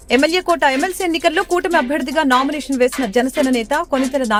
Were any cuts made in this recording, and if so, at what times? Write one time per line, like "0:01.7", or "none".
none